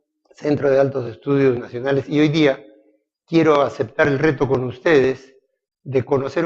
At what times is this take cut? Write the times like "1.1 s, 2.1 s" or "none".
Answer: 4.3 s